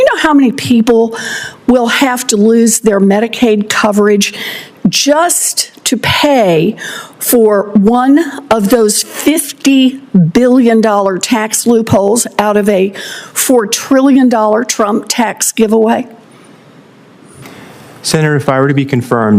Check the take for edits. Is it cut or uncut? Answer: cut